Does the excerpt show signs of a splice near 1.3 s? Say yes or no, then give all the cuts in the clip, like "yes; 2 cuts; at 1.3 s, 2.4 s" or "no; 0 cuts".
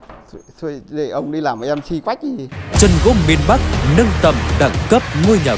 no; 1 cut; at 2.5 s